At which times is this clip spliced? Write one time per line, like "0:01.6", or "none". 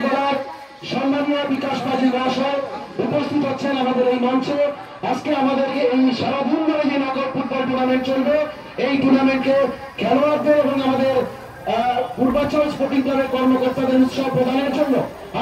none

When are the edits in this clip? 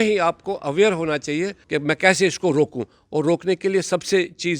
0:01.6

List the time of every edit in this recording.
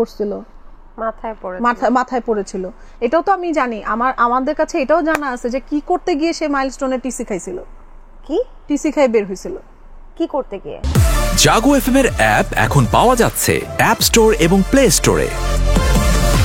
0:10.8

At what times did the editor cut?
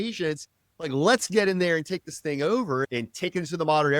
0:02.8

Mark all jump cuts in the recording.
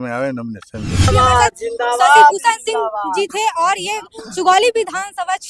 0:01.1

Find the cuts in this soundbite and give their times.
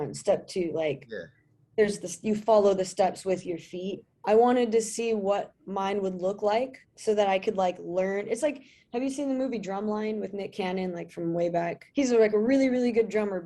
0:04.0
0:06.9
0:11.8

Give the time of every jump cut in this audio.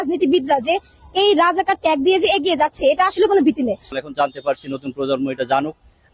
0:03.9

